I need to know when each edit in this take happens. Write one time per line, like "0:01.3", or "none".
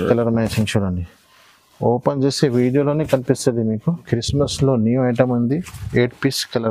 0:04.0